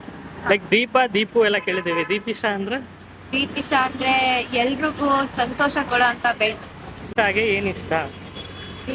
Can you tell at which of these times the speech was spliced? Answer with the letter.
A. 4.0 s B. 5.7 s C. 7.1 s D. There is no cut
C